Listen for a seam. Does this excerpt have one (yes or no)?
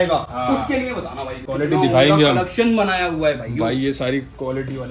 yes